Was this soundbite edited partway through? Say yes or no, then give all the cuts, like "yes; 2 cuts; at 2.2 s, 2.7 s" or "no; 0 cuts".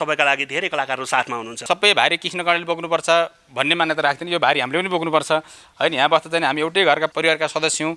yes; 1 cut; at 1.5 s